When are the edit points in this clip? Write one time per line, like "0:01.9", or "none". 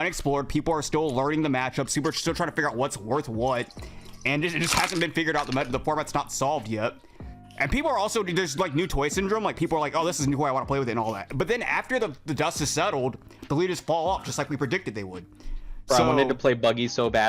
none